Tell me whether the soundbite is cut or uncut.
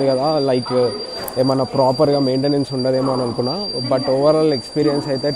uncut